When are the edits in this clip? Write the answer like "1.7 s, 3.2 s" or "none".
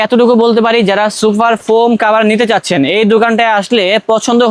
none